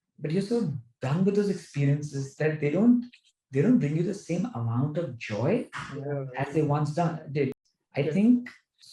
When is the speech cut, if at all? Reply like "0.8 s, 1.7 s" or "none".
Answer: 7.6 s